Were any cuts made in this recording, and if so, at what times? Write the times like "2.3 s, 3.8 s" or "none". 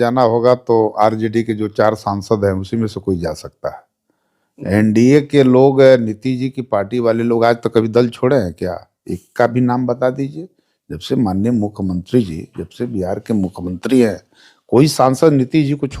none